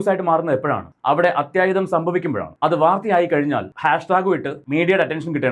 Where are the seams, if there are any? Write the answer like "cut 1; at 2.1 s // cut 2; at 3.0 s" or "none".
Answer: cut 1; at 2.5 s // cut 2; at 3.7 s